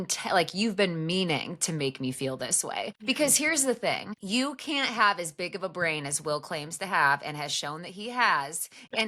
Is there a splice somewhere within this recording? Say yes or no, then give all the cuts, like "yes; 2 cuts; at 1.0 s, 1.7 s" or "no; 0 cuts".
yes; 2 cuts; at 3.0 s, 4.1 s